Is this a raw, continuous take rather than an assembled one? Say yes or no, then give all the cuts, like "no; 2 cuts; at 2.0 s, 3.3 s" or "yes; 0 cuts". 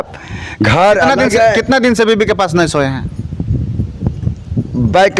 yes; 0 cuts